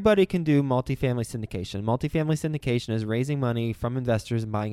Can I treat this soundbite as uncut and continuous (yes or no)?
yes